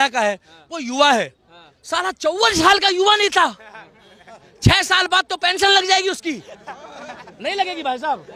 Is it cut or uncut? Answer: uncut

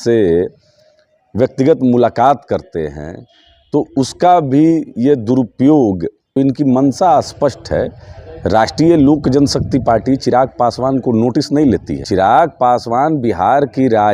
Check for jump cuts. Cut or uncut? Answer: cut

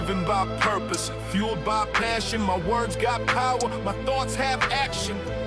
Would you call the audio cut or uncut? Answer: uncut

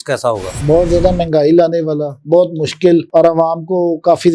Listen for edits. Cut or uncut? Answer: uncut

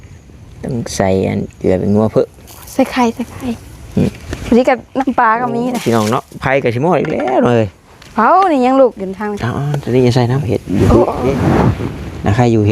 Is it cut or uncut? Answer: cut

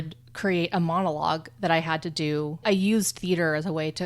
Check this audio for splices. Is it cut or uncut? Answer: cut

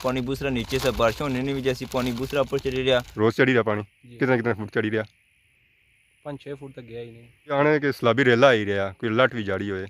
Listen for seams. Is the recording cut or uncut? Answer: cut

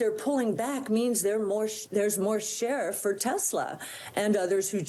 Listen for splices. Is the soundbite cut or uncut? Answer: uncut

